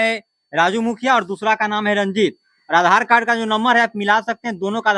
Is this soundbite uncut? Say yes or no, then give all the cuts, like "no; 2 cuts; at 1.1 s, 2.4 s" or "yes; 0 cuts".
yes; 0 cuts